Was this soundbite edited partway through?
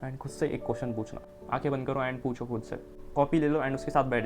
yes; 2 cuts; at 1.2 s, 2.9 s

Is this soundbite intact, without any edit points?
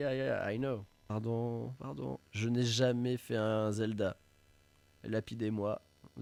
yes; 0 cuts

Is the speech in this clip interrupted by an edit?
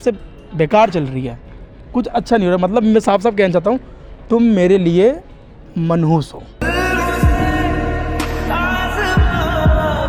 no; 0 cuts

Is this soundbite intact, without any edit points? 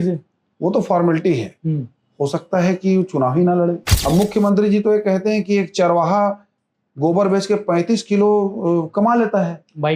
no; 1 cut; at 3.9 s

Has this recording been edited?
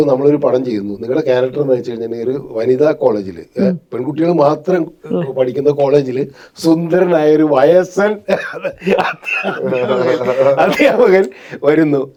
no; 0 cuts

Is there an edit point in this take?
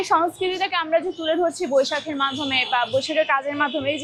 no; 0 cuts

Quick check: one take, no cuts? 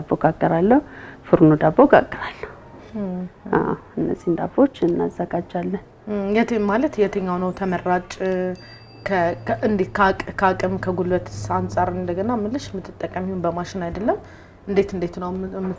yes; 0 cuts

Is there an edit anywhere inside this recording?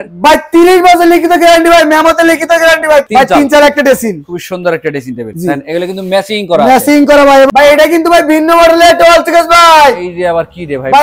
yes; 2 cuts; at 3.1 s, 7.5 s

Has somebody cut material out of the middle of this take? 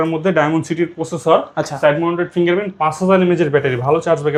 no; 0 cuts

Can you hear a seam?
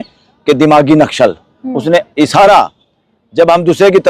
no; 0 cuts

